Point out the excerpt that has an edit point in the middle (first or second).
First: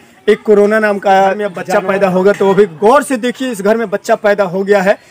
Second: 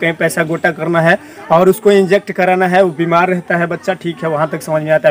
first